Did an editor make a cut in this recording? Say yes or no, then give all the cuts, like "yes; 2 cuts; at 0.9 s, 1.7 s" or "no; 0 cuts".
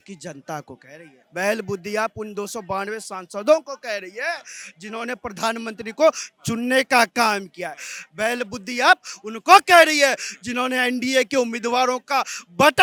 no; 0 cuts